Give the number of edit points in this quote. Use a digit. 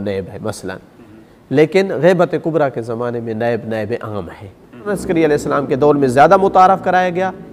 1